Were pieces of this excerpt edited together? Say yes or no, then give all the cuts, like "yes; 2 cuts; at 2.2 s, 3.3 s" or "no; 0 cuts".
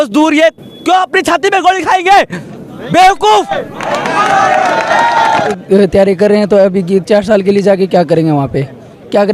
no; 0 cuts